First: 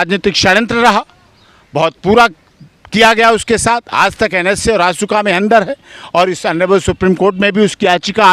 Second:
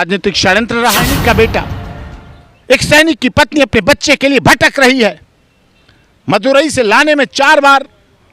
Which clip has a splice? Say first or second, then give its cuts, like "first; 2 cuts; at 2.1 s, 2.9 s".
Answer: second; 1 cut; at 1.1 s